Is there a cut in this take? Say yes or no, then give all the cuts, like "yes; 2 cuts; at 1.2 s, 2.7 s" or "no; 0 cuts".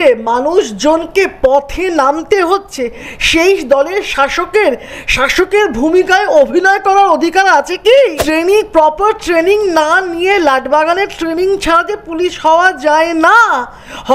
yes; 1 cut; at 8.2 s